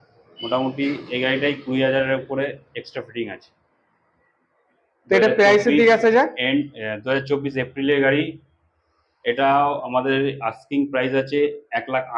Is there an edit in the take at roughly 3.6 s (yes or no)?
no